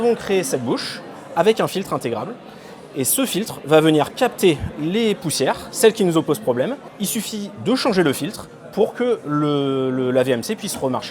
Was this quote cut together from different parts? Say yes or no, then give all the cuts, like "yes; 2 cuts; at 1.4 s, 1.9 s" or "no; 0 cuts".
no; 0 cuts